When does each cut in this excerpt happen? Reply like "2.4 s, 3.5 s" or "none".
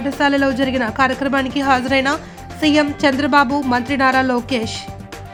none